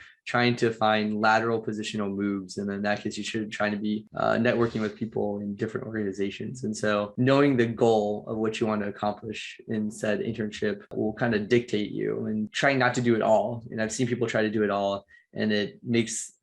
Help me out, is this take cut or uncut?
uncut